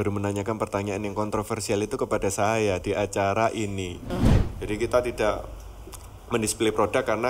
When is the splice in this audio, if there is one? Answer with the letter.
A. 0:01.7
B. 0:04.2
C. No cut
B